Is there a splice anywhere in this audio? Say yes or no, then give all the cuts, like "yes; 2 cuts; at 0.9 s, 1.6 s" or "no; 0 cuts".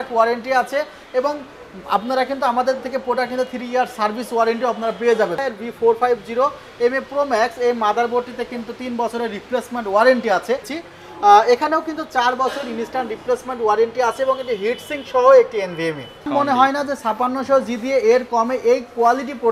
yes; 3 cuts; at 5.4 s, 10.8 s, 16.3 s